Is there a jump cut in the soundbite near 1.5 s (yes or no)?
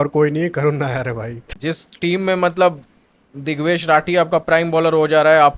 yes